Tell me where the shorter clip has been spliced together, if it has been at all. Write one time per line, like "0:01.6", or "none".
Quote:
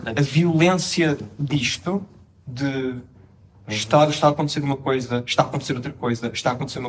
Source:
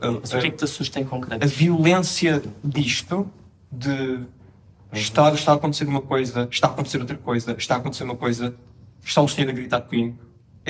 none